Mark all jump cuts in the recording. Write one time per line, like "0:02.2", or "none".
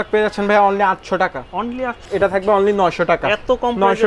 0:02.0